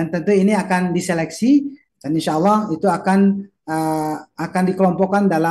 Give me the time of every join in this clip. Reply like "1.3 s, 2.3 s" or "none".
1.8 s